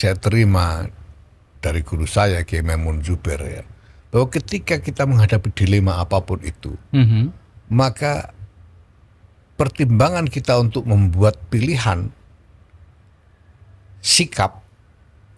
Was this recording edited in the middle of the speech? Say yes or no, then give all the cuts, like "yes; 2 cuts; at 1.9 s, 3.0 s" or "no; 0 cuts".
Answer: no; 0 cuts